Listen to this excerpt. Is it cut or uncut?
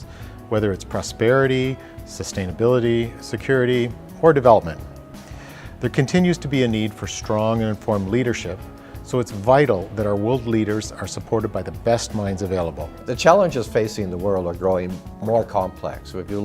cut